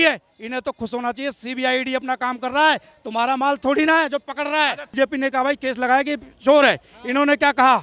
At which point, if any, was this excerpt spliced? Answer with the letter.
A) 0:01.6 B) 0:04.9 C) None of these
B